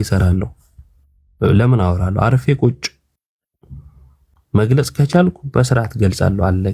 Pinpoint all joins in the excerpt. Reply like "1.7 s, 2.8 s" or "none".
none